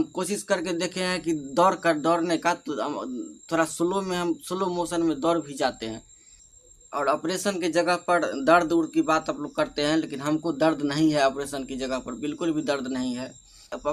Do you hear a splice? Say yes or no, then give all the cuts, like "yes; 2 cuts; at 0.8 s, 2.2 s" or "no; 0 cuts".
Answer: no; 0 cuts